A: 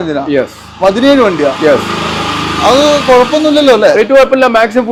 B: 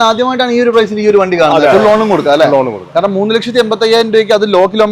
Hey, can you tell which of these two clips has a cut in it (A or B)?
B